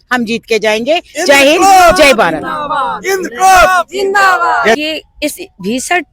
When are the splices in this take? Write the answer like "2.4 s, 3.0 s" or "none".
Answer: 4.8 s